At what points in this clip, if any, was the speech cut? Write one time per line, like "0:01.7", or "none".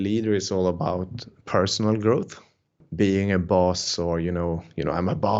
0:02.5